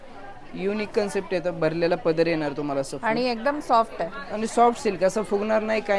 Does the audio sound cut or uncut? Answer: uncut